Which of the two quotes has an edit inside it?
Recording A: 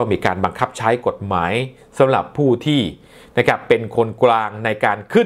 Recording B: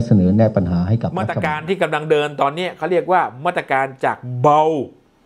B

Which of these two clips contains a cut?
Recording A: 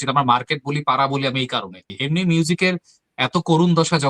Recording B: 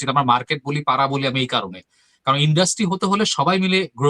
A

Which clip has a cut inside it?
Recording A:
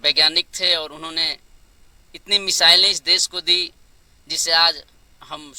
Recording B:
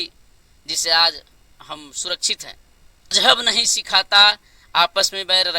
B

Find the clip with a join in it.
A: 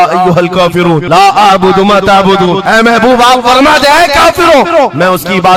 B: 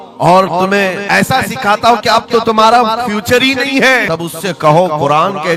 B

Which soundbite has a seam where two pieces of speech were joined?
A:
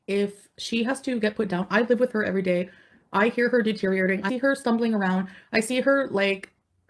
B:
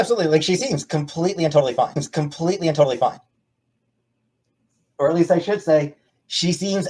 A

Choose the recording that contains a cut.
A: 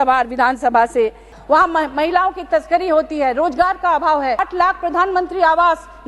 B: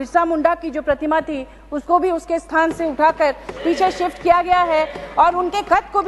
A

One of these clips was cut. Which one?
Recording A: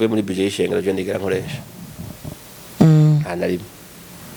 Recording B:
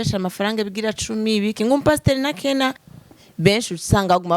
B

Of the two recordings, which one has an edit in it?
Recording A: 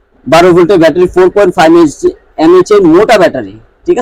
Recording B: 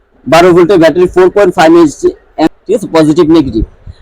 B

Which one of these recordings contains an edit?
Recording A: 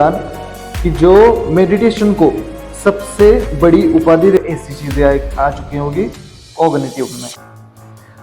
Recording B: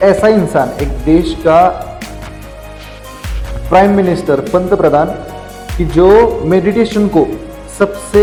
A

